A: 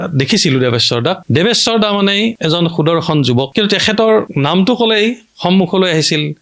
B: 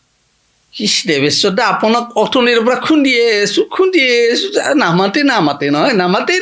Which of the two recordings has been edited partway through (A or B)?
A